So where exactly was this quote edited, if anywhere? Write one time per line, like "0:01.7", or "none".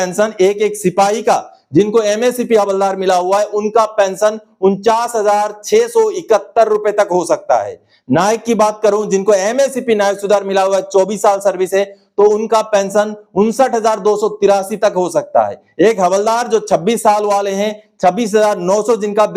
none